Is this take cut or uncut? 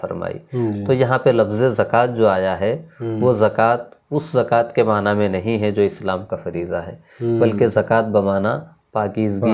uncut